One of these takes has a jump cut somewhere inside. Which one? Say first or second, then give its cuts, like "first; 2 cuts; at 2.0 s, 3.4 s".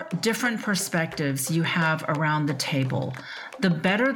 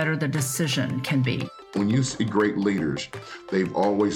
second; 1 cut; at 1.7 s